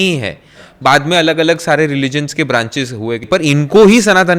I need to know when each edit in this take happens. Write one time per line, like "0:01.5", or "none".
0:03.3